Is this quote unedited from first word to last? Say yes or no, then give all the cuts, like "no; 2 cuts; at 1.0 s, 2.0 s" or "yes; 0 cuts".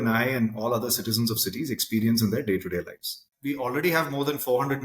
no; 1 cut; at 3.2 s